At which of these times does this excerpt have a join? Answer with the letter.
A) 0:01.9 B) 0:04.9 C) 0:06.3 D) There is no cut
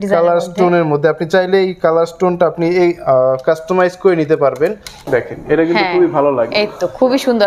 B